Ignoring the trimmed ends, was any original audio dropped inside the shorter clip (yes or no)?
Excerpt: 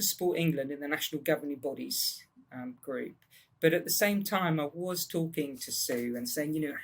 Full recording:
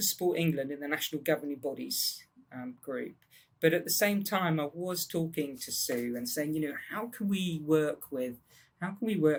no